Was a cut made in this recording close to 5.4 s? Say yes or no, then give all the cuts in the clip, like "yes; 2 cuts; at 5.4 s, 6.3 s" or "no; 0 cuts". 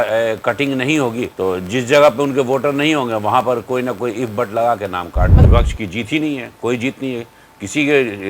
yes; 2 cuts; at 1.3 s, 5.4 s